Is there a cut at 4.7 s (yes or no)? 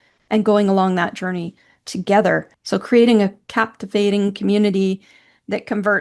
no